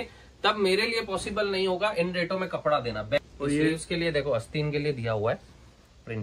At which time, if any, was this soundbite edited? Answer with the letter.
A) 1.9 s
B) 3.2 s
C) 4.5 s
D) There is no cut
B